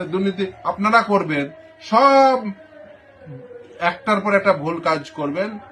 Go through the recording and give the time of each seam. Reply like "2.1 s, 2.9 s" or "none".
none

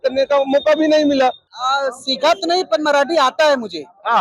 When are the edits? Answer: 1.5 s

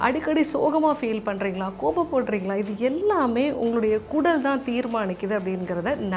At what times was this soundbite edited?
none

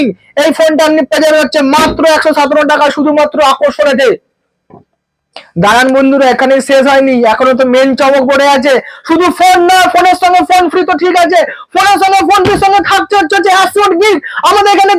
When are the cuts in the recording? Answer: none

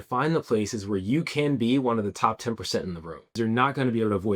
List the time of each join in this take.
3.4 s

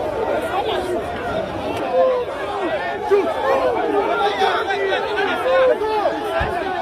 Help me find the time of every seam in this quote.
1.8 s

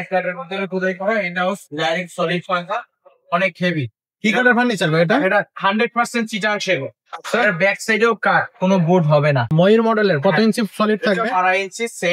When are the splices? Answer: 9.4 s

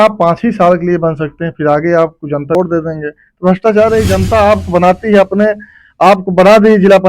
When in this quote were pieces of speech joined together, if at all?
2.5 s

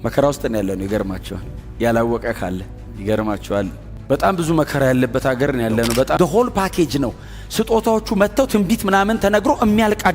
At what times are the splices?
6.2 s

